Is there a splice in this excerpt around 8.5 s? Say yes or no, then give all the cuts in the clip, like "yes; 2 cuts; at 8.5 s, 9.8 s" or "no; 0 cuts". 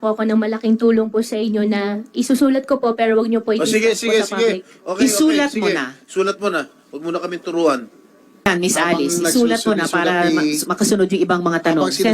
yes; 1 cut; at 8.5 s